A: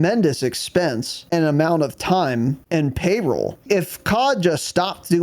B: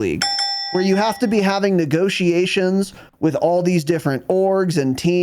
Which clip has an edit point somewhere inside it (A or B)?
A